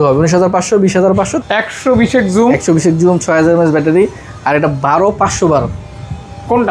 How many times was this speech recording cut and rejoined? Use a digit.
1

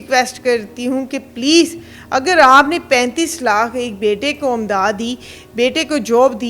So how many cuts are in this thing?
0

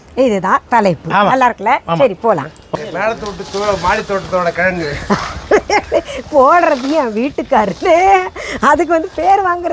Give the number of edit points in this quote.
1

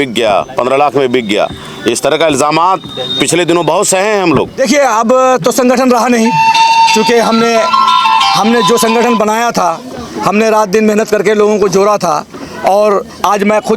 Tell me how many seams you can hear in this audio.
1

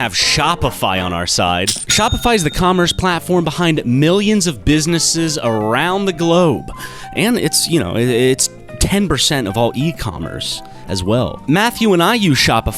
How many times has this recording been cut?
1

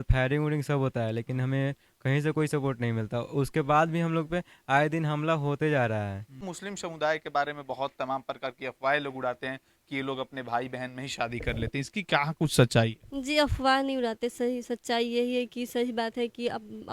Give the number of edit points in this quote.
1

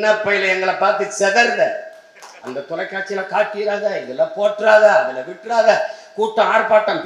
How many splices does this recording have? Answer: 1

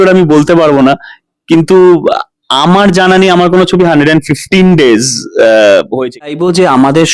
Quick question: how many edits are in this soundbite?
1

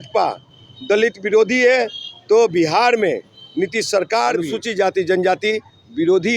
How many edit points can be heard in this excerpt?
1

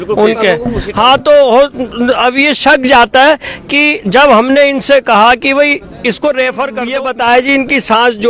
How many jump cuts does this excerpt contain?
1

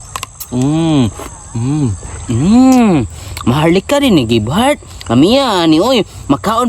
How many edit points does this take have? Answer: 1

